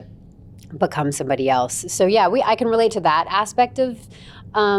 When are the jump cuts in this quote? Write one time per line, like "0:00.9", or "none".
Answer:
none